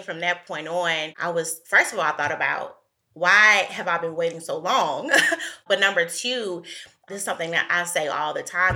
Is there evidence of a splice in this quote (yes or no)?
no